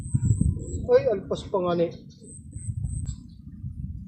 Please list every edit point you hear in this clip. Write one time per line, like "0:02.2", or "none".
0:03.0